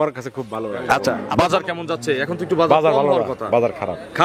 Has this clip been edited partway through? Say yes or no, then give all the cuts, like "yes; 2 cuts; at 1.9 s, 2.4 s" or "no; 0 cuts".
yes; 1 cut; at 1.2 s